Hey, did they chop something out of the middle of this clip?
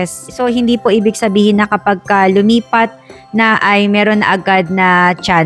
no; 0 cuts

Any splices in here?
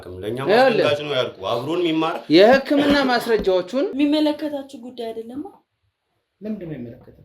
yes; 1 cut; at 3.9 s

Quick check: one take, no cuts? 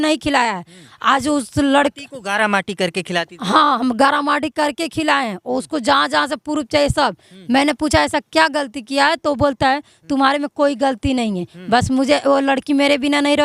yes; 0 cuts

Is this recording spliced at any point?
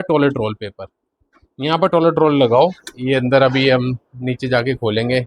yes; 1 cut; at 2.9 s

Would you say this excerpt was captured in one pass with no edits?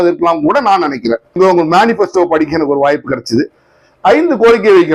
no; 1 cut; at 1.4 s

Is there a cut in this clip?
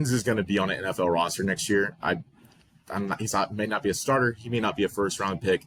no; 0 cuts

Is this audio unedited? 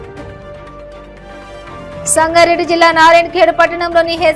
no; 1 cut; at 2.1 s

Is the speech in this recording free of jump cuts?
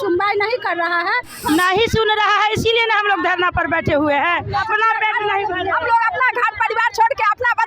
no; 1 cut; at 1.4 s

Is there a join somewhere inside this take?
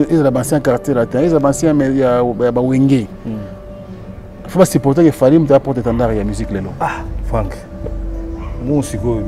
no; 0 cuts

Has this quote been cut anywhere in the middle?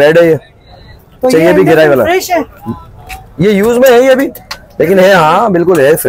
no; 0 cuts

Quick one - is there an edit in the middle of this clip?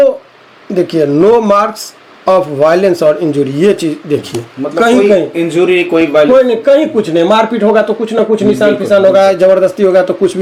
no; 0 cuts

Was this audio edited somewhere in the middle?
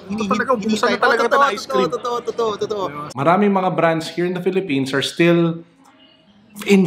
yes; 1 cut; at 3.0 s

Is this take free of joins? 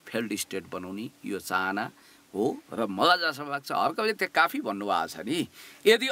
yes; 0 cuts

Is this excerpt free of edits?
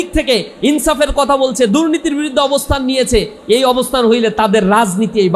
yes; 0 cuts

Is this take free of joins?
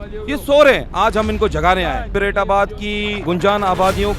no; 2 cuts; at 2.0 s, 3.2 s

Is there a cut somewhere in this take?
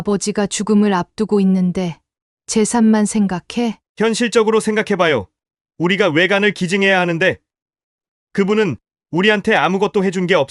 no; 0 cuts

